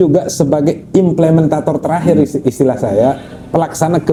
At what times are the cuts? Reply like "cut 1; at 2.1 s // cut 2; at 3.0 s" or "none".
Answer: none

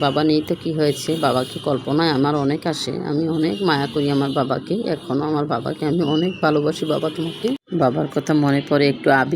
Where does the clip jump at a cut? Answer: cut 1; at 7.6 s

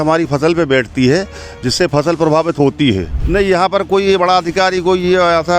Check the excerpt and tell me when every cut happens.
cut 1; at 3.2 s

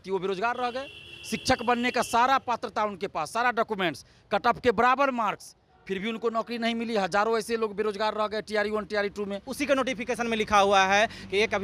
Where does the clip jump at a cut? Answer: cut 1; at 9.5 s

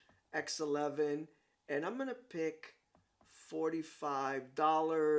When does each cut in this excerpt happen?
cut 1; at 3.4 s

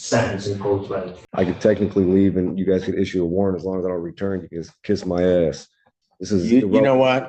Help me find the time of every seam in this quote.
cut 1; at 1.2 s

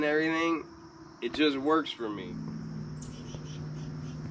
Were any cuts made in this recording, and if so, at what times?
cut 1; at 2.2 s

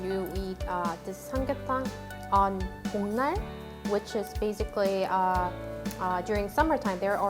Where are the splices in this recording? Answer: none

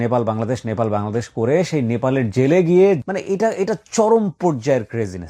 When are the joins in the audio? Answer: cut 1; at 3.0 s

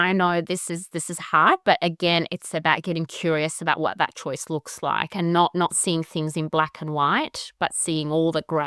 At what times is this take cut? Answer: none

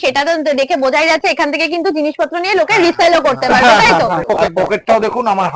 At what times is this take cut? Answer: cut 1; at 4.2 s

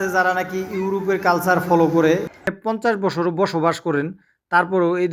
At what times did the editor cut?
cut 1; at 2.5 s

